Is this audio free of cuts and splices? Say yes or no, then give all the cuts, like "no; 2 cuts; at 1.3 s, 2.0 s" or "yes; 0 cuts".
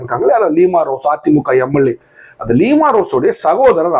yes; 0 cuts